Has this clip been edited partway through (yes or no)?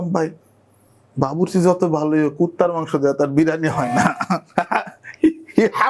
no